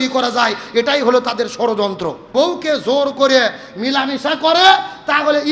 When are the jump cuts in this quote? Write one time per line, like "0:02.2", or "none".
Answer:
0:02.3